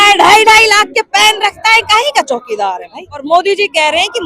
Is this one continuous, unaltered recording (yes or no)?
no